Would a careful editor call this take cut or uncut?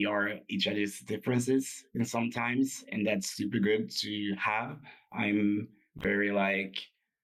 uncut